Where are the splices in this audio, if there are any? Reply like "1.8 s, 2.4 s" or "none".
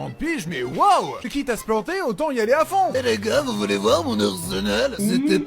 1.2 s, 2.9 s

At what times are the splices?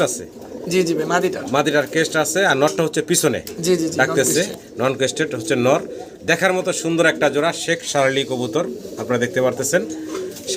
none

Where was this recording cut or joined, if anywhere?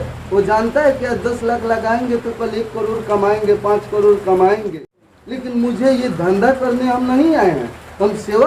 4.8 s

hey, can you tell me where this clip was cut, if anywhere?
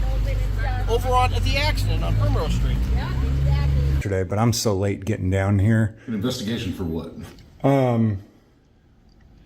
4.0 s

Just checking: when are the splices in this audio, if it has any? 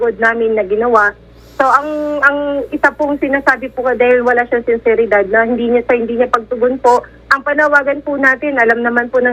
none

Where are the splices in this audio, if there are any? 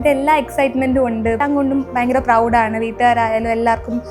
1.4 s

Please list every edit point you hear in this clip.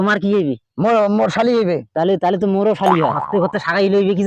3.1 s

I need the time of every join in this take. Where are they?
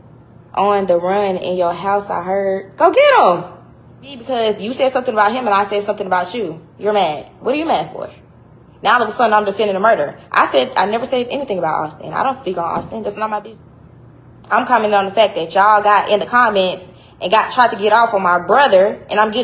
4.2 s, 13.5 s

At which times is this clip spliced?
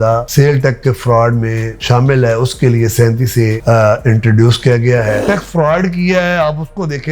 5.2 s

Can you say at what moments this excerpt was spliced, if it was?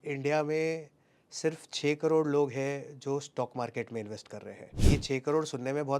4.8 s

